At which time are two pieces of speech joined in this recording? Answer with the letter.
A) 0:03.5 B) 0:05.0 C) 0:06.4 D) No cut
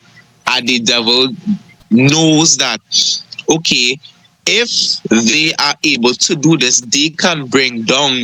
D